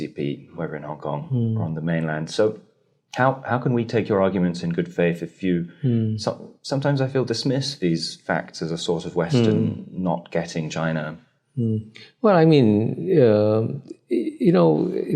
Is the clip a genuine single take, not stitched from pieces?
yes; 0 cuts

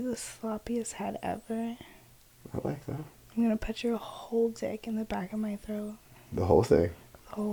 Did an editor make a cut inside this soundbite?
no; 0 cuts

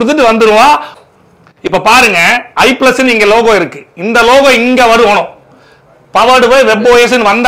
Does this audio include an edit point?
yes; 1 cut; at 0.9 s

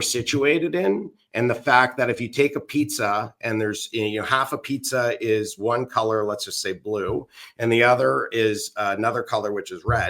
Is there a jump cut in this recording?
no; 0 cuts

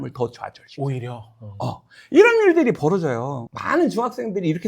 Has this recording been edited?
yes; 1 cut; at 3.4 s

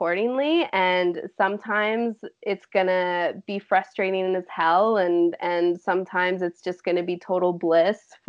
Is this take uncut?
yes; 0 cuts

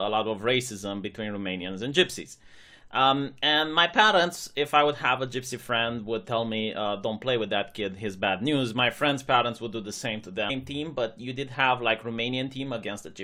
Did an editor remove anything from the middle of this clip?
no; 0 cuts

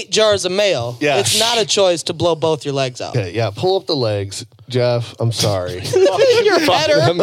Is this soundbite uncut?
no; 1 cut; at 3.1 s

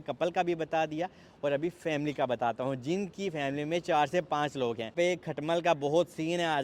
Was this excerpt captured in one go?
no; 1 cut; at 4.9 s

